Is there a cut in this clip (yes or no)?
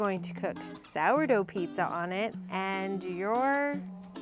no